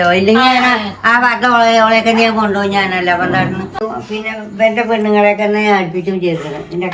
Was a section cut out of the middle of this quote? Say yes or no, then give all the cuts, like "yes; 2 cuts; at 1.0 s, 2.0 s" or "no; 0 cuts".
yes; 1 cut; at 3.8 s